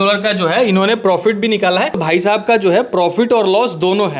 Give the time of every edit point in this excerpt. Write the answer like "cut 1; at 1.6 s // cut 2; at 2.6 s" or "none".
cut 1; at 2.0 s

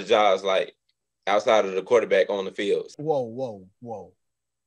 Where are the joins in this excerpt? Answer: cut 1; at 2.9 s

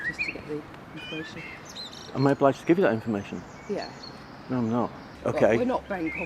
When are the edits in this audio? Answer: cut 1; at 5.1 s

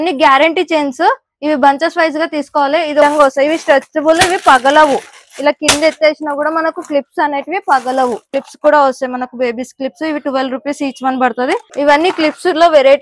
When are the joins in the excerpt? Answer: cut 1; at 3.0 s // cut 2; at 8.4 s // cut 3; at 11.7 s

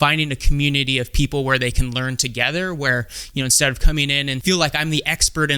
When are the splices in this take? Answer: cut 1; at 4.4 s

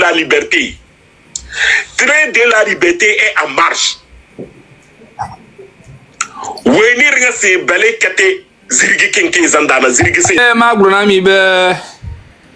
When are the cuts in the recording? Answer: cut 1; at 10.4 s

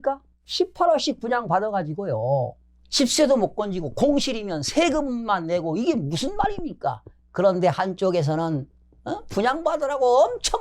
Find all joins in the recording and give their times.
none

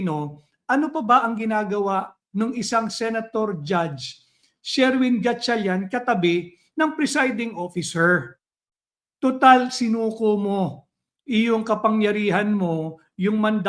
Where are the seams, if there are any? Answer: none

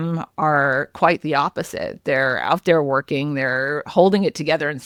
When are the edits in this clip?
none

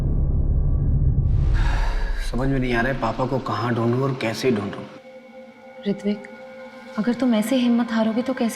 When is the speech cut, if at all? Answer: cut 1; at 1.6 s

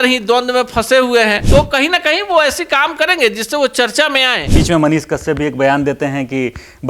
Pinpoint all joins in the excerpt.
cut 1; at 1.4 s // cut 2; at 4.4 s

